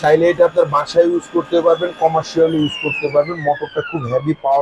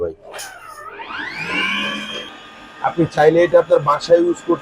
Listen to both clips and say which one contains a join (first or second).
second